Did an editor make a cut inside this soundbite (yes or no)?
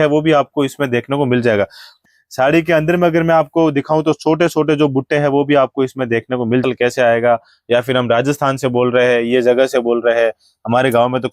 yes